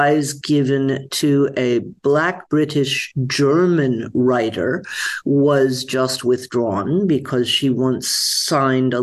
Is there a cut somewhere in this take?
no; 0 cuts

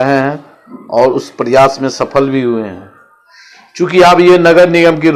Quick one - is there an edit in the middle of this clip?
no; 0 cuts

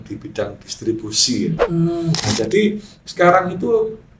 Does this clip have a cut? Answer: yes; 1 cut; at 2.2 s

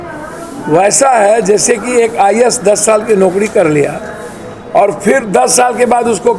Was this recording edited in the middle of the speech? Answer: no; 0 cuts

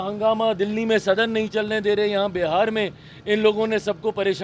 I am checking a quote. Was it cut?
no; 0 cuts

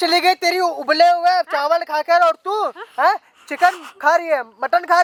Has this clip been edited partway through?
no; 0 cuts

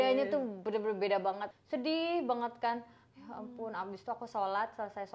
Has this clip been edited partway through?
yes; 1 cut; at 1.5 s

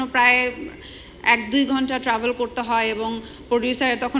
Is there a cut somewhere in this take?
no; 0 cuts

